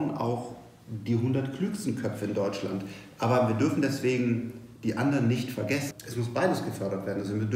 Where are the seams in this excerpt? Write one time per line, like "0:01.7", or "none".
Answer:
0:05.9